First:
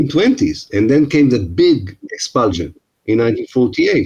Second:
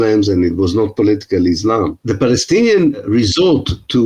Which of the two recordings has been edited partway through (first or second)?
second